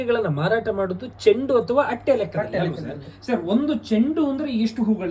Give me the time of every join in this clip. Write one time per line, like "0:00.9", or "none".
none